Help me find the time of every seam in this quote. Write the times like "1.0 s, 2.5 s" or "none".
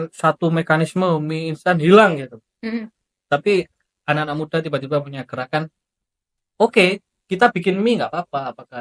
none